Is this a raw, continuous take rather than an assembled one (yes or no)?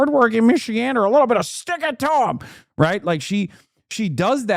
yes